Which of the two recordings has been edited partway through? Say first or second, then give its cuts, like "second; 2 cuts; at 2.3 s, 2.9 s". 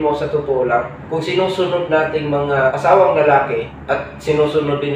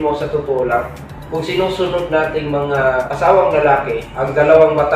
first; 3 cuts; at 1.0 s, 2.7 s, 3.7 s